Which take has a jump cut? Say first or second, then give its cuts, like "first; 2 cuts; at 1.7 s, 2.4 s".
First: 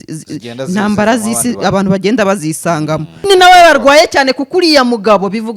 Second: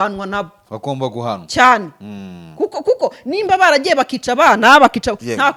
first; 1 cut; at 3.3 s